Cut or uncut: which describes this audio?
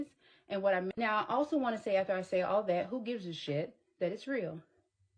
cut